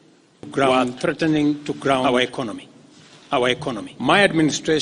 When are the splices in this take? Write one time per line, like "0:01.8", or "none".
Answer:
0:03.9